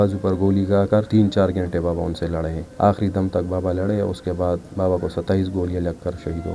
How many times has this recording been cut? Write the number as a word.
two